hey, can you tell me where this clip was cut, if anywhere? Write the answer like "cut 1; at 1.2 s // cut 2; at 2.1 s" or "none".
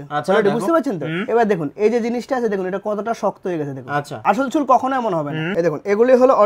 cut 1; at 4.2 s // cut 2; at 5.5 s